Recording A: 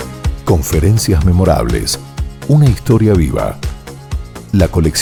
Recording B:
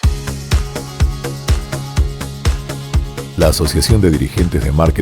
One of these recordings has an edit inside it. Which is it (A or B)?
B